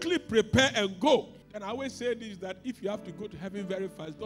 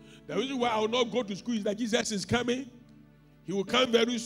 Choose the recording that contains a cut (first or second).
first